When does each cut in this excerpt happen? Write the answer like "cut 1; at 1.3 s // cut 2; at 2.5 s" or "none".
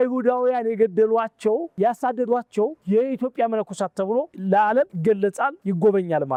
none